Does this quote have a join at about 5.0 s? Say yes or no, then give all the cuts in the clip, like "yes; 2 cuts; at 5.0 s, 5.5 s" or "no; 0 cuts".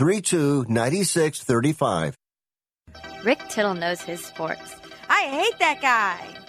no; 1 cut; at 2.9 s